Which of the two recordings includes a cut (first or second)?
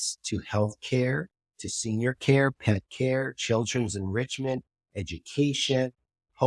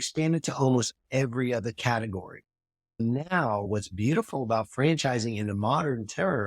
second